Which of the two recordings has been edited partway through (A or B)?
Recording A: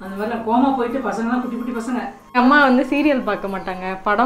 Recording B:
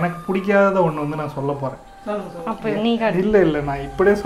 A